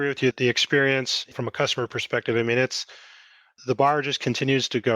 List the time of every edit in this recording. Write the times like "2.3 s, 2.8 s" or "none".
1.3 s